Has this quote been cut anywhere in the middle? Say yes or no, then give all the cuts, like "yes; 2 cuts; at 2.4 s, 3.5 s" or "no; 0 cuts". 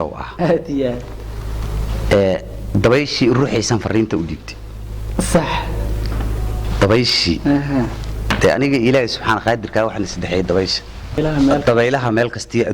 yes; 1 cut; at 11.2 s